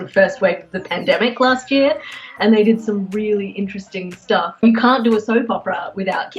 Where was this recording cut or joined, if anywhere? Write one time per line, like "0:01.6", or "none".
0:04.6